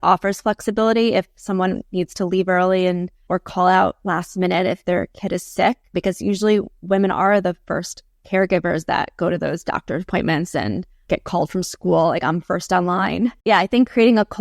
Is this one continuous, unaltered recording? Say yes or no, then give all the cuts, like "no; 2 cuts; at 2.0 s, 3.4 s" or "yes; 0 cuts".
no; 4 cuts; at 3.2 s, 5.9 s, 11.0 s, 13.4 s